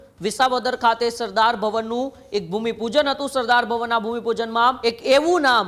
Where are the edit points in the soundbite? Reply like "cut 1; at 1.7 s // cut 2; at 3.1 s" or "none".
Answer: cut 1; at 4.8 s

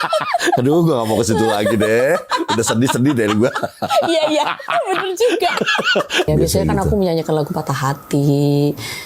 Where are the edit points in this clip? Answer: cut 1; at 6.3 s

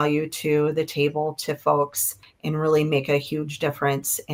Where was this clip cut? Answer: none

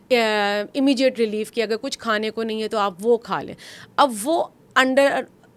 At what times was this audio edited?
none

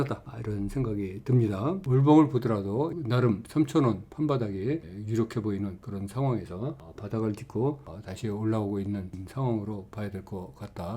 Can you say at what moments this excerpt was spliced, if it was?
cut 1; at 1.8 s // cut 2; at 3.0 s

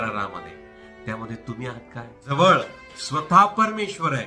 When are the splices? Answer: cut 1; at 2.3 s

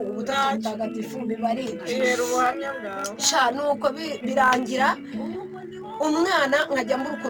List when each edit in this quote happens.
cut 1; at 2.6 s

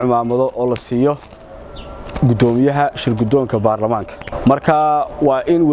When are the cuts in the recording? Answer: none

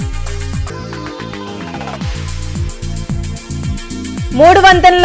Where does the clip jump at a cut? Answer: cut 1; at 2.0 s // cut 2; at 3.5 s

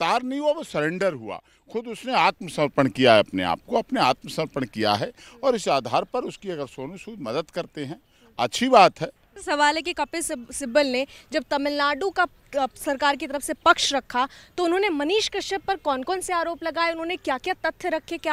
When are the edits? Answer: cut 1; at 9.3 s

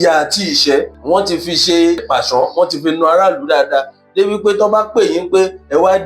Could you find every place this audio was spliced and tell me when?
cut 1; at 1.0 s // cut 2; at 2.0 s

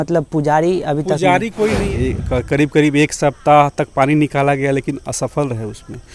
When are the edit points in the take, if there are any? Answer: cut 1; at 1.7 s

